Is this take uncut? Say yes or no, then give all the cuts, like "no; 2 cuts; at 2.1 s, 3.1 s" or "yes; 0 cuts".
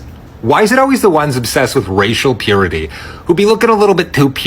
yes; 0 cuts